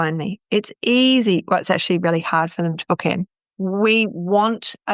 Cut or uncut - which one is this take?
cut